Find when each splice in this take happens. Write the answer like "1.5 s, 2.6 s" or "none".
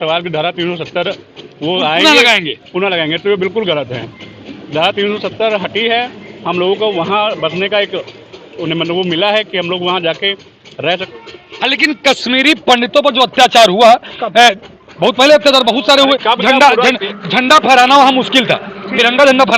11.1 s

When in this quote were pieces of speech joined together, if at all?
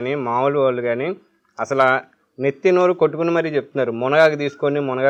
none

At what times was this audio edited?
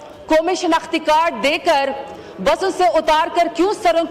none

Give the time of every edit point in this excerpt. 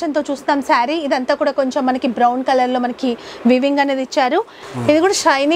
4.6 s

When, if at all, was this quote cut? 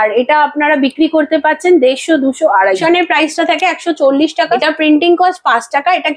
2.8 s, 4.6 s

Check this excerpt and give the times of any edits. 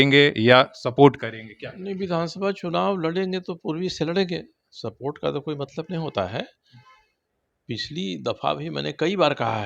none

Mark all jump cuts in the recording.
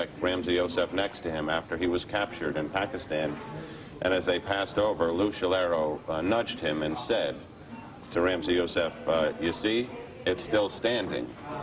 4.8 s

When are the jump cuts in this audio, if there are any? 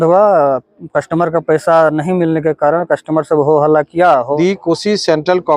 4.3 s

